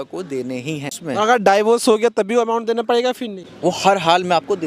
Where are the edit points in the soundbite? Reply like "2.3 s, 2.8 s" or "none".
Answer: 0.9 s, 3.4 s